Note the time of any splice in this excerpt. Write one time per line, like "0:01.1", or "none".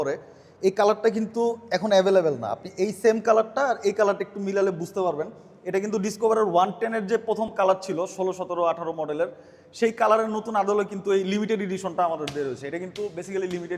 none

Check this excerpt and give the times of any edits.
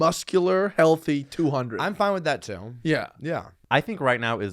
0:03.6

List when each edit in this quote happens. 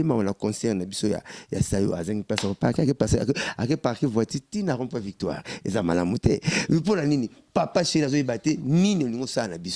none

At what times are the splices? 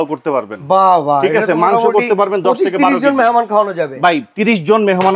none

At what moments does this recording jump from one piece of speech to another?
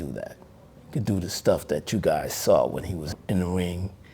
0:03.1

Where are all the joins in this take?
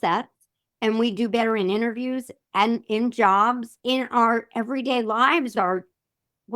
0:03.7
0:05.5

